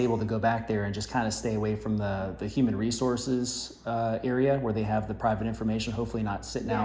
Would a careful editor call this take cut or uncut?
uncut